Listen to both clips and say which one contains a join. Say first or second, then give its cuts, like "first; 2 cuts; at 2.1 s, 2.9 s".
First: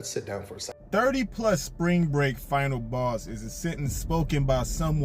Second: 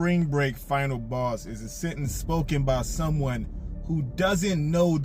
first; 1 cut; at 0.9 s